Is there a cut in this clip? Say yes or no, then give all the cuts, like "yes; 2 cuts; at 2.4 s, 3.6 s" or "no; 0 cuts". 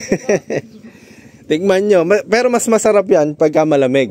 no; 0 cuts